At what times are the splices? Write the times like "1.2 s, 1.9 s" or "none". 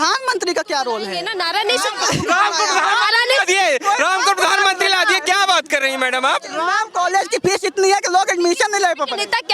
1.3 s, 6.8 s